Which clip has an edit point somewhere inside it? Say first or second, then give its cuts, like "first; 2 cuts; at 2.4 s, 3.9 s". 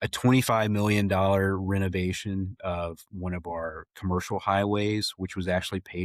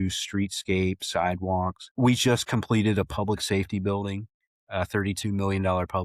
second; 1 cut; at 1.8 s